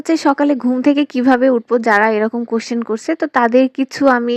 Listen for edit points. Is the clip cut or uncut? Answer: uncut